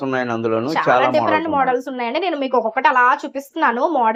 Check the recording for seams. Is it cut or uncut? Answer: uncut